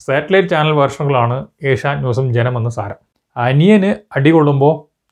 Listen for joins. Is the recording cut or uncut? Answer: cut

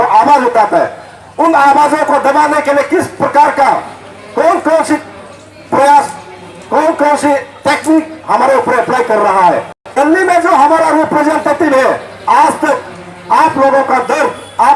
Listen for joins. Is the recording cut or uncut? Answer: cut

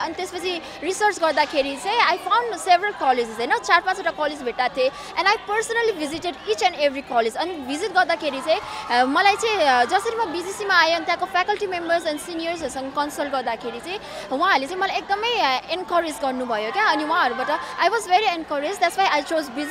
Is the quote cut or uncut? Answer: uncut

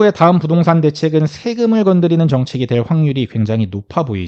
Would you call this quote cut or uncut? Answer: uncut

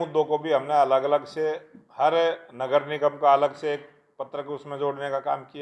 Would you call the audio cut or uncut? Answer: uncut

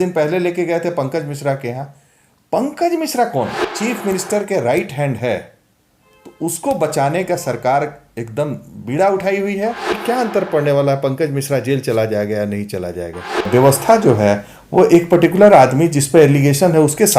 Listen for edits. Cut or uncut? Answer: cut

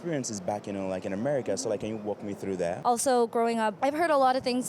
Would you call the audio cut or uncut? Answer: cut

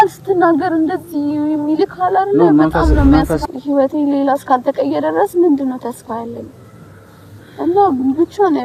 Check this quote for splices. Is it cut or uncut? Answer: cut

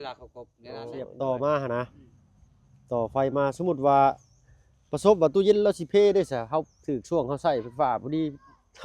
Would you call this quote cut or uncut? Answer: cut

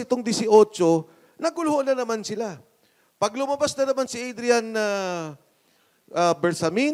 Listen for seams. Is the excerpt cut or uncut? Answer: uncut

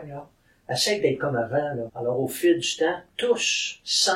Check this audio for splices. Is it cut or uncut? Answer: cut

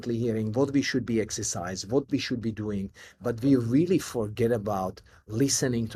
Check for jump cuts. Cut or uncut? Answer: uncut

